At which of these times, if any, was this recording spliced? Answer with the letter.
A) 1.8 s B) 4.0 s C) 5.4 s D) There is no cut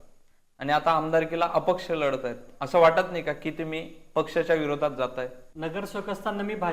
C